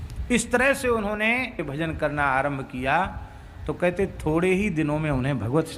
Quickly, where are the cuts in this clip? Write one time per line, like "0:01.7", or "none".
0:01.6